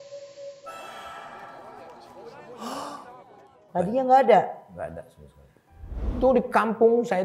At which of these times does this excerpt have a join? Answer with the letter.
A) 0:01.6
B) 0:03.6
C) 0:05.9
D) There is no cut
C